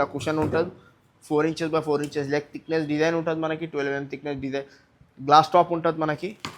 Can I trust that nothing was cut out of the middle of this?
yes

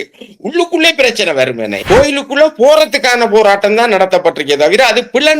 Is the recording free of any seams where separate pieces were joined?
no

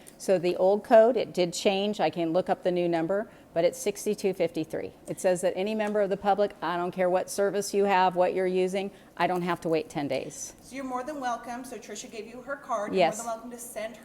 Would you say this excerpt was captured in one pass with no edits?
no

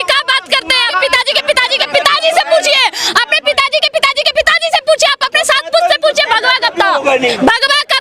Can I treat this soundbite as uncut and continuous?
no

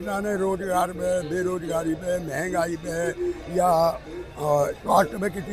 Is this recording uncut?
yes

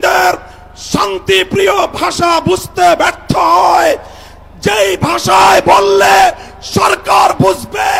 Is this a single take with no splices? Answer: yes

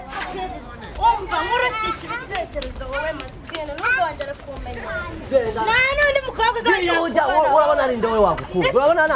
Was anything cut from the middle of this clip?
yes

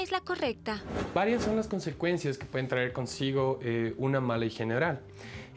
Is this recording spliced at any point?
yes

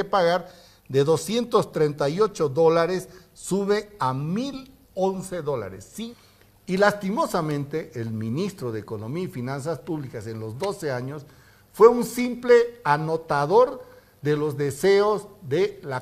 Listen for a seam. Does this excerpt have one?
yes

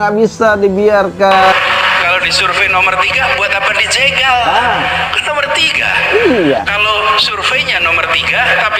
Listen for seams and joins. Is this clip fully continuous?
no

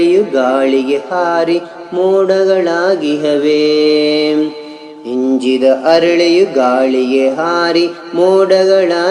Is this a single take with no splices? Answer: yes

